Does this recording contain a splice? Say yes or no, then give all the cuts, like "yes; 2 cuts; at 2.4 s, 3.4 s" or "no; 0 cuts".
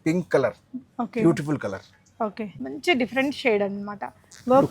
yes; 1 cut; at 2.4 s